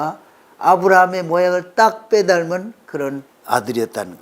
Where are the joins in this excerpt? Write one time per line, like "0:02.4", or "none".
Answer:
0:03.3